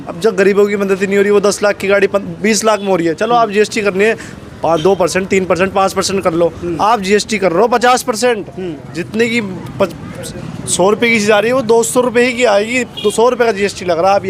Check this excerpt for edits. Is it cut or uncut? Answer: uncut